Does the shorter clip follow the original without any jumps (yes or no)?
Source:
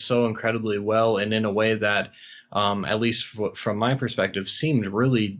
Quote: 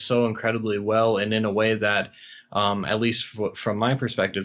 yes